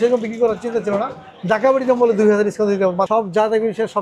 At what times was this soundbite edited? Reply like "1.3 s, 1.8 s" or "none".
3.1 s